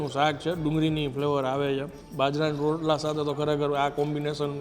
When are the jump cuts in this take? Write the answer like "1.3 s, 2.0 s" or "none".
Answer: 2.0 s